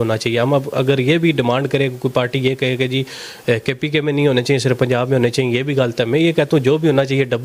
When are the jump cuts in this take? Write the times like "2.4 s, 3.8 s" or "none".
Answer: none